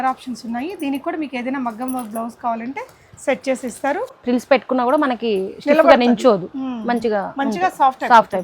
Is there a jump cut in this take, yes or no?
yes